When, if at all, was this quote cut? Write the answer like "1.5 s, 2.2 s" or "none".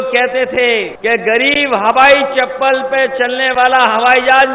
0.9 s